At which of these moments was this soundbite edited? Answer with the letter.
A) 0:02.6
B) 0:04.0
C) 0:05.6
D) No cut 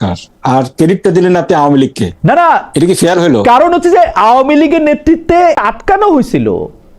C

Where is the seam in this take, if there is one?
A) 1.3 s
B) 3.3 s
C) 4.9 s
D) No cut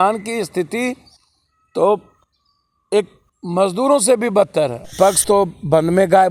C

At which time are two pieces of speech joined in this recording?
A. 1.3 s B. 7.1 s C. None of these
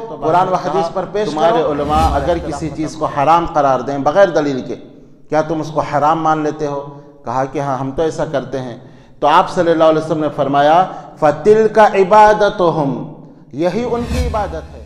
A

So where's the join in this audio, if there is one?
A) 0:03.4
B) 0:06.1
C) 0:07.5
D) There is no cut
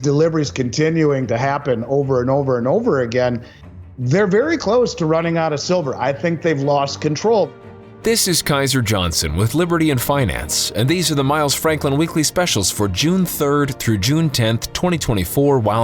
C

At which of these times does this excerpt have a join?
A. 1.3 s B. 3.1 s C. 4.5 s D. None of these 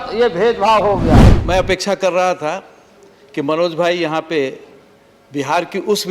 A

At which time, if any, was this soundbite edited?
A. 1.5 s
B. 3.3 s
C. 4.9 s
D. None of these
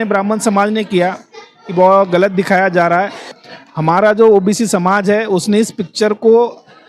B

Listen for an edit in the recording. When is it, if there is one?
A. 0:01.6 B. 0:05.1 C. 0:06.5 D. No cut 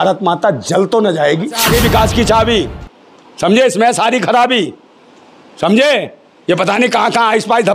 A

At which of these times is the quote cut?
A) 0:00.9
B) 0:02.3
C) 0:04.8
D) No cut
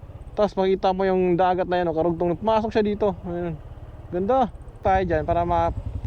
C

